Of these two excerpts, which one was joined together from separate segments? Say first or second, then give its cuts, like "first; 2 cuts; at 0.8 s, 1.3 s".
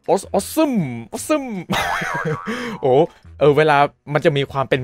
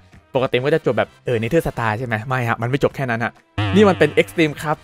second; 1 cut; at 1.2 s